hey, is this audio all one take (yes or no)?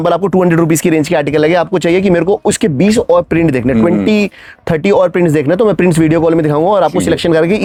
yes